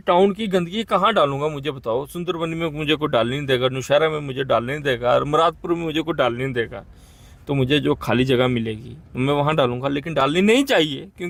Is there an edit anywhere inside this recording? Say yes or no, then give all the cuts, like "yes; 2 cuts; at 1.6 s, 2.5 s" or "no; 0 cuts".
no; 0 cuts